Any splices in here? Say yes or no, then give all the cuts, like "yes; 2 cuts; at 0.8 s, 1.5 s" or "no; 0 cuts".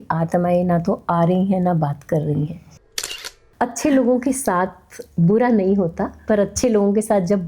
yes; 1 cut; at 2.9 s